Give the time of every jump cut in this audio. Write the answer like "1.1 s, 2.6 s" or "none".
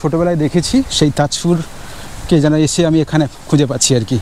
none